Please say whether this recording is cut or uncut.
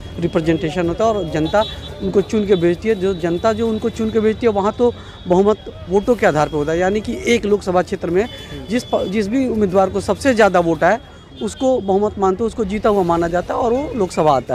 uncut